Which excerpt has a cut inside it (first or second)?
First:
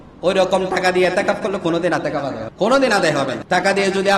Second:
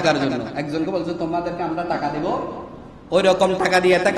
first